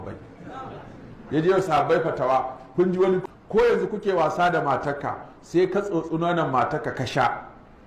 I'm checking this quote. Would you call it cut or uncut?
cut